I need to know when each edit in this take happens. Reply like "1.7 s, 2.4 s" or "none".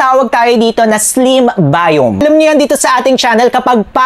2.2 s